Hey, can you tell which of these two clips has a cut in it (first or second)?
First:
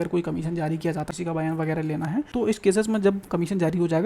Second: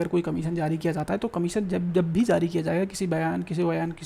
first